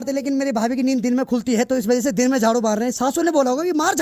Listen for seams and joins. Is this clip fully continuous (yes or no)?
yes